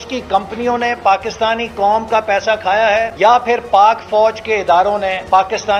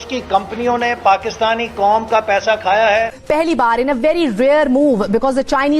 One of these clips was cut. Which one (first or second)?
second